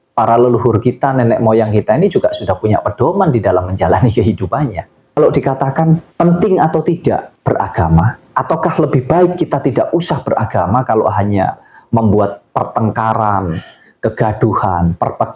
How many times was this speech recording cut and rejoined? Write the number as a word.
one